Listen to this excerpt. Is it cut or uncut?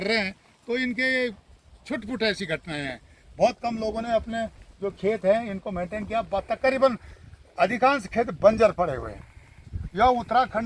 uncut